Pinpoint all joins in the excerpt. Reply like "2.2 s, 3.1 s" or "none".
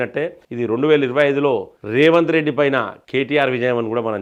none